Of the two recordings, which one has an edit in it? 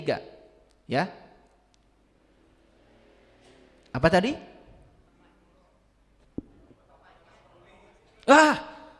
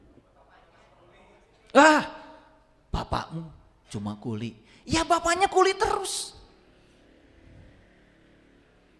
first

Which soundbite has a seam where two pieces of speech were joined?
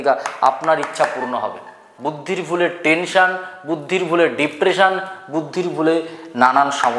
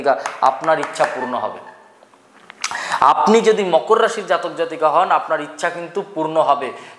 first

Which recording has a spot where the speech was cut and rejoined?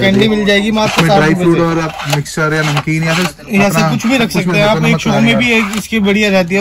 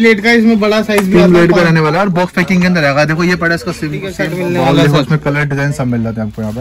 second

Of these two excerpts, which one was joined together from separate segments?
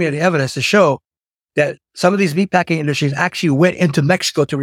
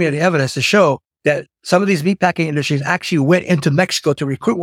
second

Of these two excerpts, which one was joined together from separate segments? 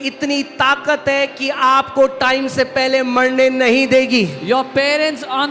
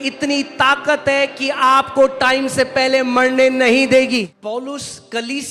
second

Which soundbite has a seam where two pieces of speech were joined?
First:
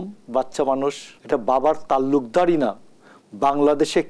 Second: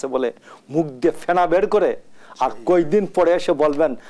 first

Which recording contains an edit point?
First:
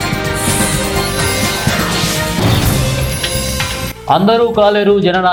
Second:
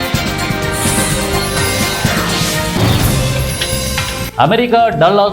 second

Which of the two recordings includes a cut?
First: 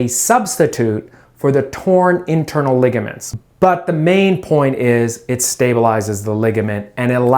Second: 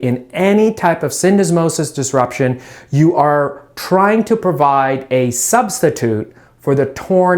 first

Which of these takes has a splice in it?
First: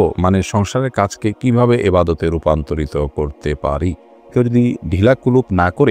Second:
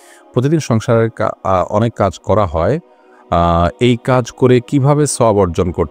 first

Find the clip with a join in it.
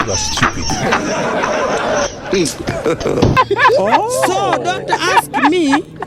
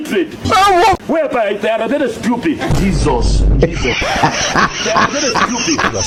first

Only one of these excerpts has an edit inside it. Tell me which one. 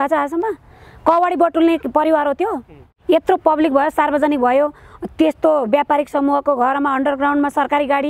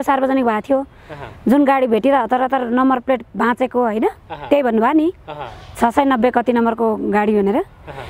first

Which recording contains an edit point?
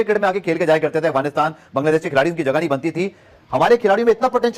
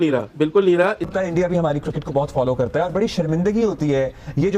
second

